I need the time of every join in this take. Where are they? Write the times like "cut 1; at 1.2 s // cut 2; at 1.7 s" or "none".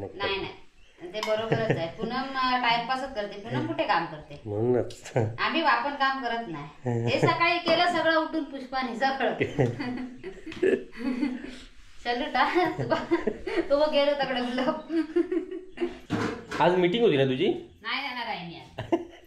cut 1; at 16.0 s